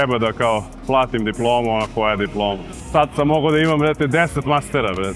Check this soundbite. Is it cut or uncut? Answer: uncut